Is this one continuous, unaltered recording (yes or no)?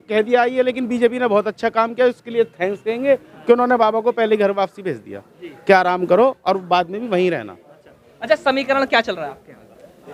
yes